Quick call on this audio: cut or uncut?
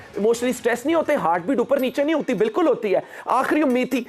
uncut